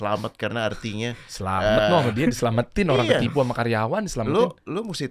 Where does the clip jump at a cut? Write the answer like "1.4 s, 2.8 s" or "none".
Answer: none